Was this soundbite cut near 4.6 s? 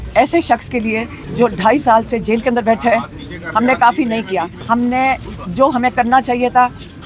yes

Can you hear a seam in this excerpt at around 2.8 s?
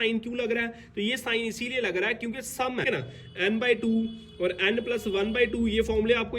yes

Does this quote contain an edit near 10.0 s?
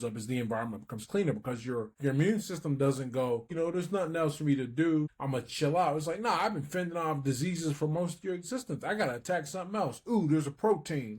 no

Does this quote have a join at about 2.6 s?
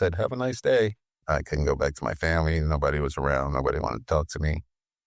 no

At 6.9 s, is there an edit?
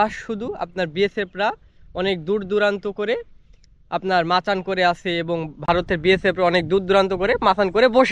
no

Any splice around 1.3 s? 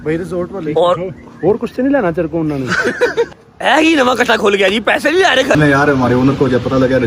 no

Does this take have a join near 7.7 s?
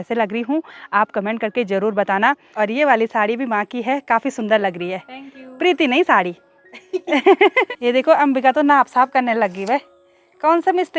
yes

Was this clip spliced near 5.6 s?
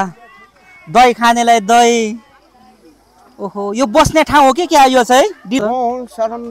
yes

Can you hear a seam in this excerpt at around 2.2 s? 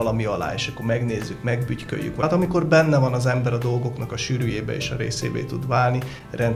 yes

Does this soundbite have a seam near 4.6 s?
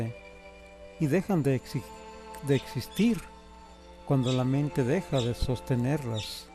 yes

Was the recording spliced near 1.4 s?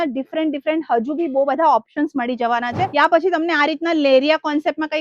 no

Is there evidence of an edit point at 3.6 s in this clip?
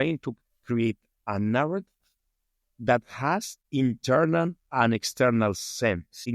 yes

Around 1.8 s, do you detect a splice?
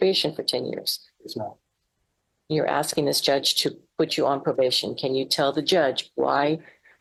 no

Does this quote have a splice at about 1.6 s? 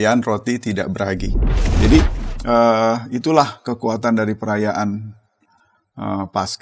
yes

